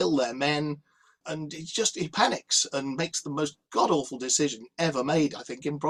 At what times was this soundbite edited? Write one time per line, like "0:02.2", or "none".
none